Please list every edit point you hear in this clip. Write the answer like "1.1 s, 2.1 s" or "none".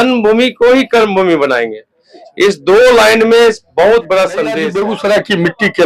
4.7 s